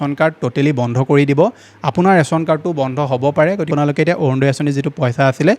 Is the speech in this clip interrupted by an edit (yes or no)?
yes